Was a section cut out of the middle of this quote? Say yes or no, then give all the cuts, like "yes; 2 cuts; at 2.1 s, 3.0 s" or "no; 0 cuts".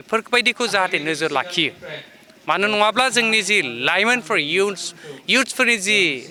no; 0 cuts